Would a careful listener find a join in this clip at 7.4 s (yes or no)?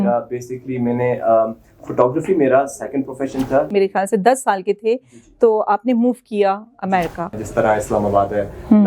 yes